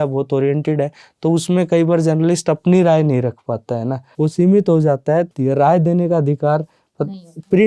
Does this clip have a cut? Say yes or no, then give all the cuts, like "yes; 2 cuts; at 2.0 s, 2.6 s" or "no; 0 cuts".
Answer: yes; 2 cuts; at 4.1 s, 5.3 s